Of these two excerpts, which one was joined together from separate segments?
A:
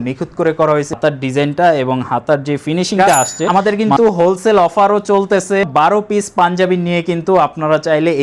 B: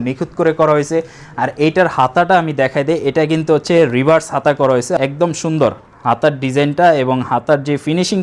A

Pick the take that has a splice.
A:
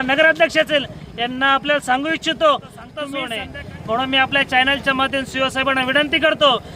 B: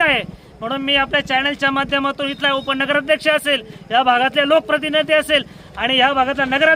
A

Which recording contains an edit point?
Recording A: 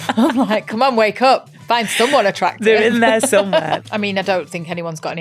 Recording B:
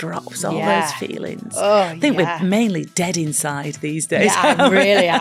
A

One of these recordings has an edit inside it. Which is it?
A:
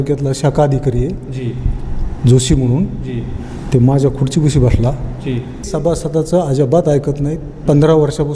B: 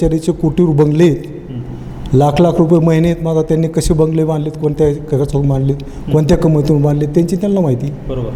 A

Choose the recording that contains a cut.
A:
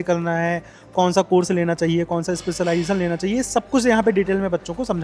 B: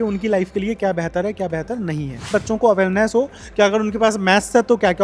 B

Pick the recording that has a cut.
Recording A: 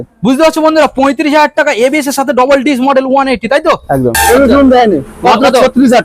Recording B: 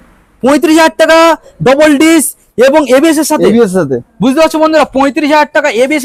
A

